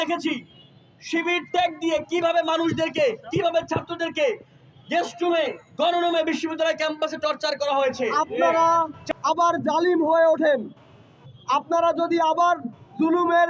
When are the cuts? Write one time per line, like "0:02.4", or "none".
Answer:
0:08.5